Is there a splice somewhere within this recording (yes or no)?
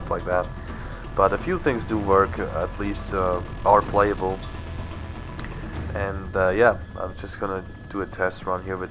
yes